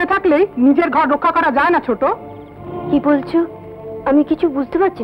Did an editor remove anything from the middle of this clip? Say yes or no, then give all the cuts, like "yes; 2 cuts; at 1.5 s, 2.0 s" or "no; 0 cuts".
no; 0 cuts